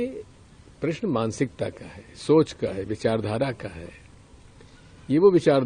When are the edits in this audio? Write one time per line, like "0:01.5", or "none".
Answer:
none